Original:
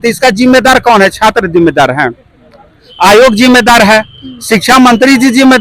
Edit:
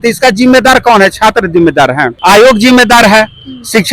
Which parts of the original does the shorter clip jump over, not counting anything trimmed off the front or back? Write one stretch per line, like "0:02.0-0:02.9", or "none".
0:02.1-0:02.9